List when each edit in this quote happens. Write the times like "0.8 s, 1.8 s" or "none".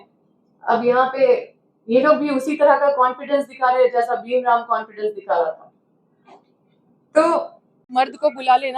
7.9 s